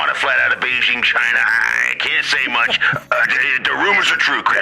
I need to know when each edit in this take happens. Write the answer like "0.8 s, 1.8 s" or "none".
none